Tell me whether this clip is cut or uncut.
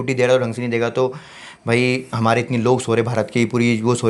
uncut